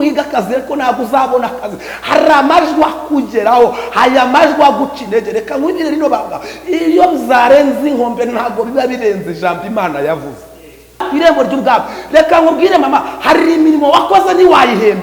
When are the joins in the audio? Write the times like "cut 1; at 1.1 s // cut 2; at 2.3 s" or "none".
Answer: cut 1; at 11.1 s